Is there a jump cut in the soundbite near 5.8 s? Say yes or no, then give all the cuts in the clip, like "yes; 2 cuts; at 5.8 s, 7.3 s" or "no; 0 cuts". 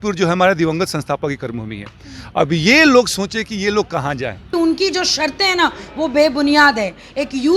no; 1 cut; at 4.5 s